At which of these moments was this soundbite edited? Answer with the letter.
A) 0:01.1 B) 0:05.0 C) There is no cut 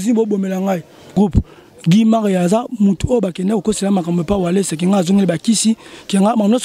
A